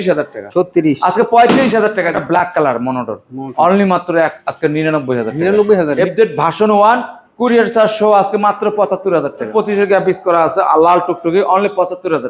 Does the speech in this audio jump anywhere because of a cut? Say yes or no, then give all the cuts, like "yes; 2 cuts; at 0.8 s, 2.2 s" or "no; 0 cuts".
yes; 3 cuts; at 2.1 s, 5.9 s, 9.5 s